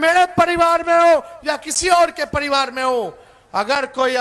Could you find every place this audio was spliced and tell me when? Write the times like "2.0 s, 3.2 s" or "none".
none